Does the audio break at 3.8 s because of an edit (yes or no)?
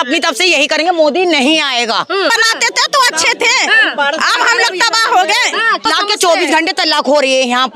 no